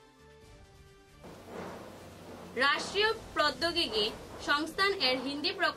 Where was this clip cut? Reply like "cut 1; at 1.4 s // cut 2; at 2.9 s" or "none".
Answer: cut 1; at 1.2 s